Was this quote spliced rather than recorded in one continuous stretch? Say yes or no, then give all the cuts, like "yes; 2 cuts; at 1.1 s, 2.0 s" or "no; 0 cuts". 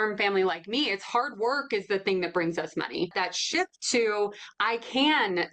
yes; 1 cut; at 3.1 s